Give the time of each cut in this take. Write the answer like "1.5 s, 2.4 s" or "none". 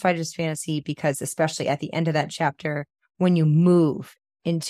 none